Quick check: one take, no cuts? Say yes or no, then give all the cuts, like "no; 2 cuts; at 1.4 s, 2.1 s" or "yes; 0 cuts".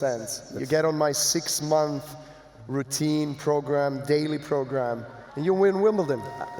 yes; 0 cuts